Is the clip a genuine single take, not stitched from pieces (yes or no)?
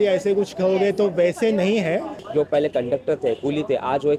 no